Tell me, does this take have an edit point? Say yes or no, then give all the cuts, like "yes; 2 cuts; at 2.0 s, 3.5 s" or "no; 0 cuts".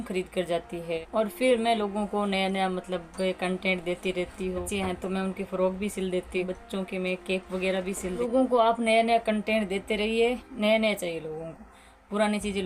yes; 5 cuts; at 1.0 s, 4.6 s, 6.4 s, 8.2 s, 10.5 s